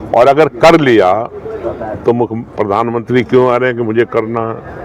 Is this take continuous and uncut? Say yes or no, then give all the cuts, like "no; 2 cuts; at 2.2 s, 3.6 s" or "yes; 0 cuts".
yes; 0 cuts